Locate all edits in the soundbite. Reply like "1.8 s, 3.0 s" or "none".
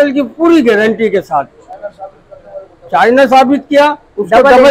none